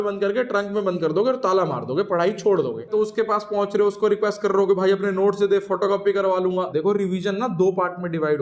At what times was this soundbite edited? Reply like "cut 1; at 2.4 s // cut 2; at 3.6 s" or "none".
cut 1; at 2.9 s // cut 2; at 6.7 s